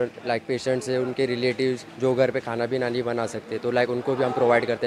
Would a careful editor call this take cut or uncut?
cut